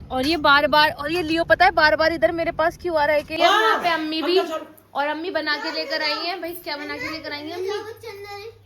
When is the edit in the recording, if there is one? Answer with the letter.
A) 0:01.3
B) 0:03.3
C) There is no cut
B